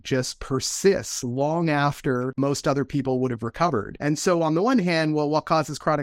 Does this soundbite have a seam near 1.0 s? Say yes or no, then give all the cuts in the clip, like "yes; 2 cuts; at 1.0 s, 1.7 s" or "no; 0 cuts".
no; 2 cuts; at 2.3 s, 3.9 s